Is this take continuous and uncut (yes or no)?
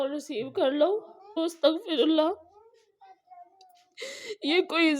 no